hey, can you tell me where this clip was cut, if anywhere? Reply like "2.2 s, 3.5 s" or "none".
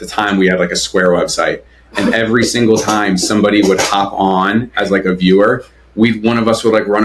none